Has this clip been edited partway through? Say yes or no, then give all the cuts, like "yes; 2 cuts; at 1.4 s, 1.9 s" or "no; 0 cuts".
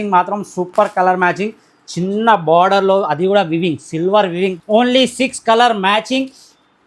yes; 1 cut; at 4.5 s